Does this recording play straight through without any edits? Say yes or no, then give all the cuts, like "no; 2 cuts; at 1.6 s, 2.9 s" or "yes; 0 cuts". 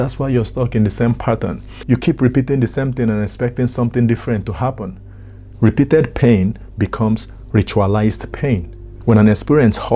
no; 1 cut; at 8.9 s